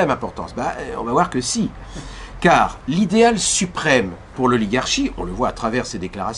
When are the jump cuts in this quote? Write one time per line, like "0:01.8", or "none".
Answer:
none

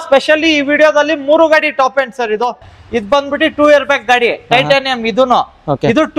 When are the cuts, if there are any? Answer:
0:02.7

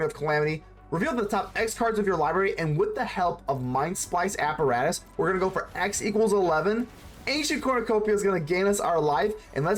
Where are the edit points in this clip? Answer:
none

